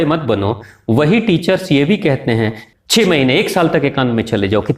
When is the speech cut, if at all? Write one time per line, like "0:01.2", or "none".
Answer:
0:02.6